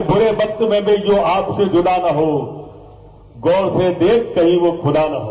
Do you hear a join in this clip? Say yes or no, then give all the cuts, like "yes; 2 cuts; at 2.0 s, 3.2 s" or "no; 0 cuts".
no; 0 cuts